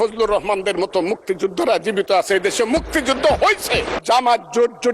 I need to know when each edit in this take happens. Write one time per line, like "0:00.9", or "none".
0:03.9